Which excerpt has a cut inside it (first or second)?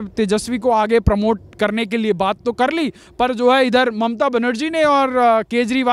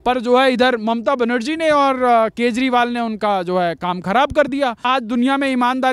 second